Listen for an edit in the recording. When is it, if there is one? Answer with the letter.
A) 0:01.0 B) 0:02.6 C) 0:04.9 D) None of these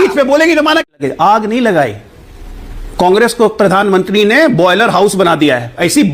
A